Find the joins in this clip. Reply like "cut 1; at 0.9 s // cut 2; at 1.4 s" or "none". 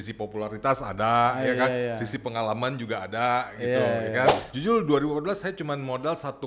cut 1; at 4.5 s